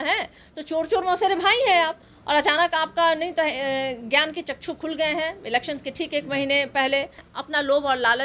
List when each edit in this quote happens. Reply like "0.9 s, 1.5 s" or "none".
2.1 s, 7.3 s